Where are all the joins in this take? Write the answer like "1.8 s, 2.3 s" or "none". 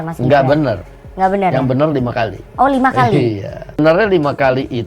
3.8 s